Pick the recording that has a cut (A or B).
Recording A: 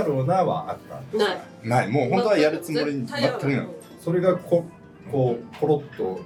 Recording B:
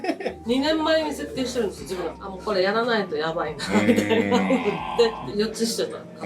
B